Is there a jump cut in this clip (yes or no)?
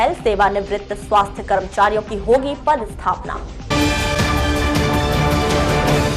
no